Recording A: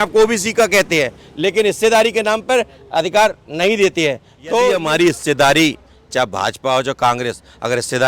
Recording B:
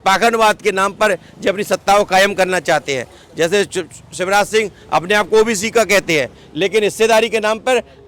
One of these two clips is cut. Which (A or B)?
A